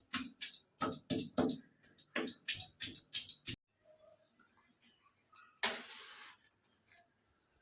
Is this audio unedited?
no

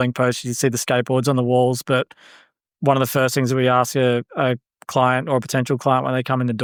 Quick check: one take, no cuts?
yes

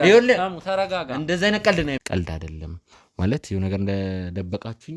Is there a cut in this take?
yes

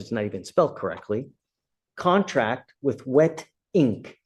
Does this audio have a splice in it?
no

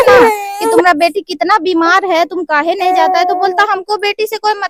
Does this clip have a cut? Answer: no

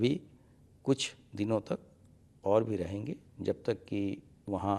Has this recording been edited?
no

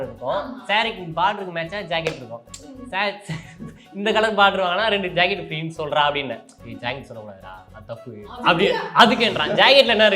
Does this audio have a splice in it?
no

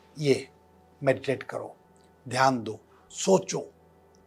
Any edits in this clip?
no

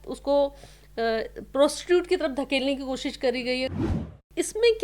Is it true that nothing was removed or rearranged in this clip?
no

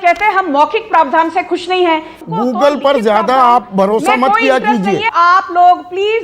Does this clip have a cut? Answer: yes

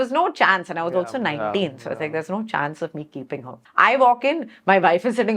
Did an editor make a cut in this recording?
yes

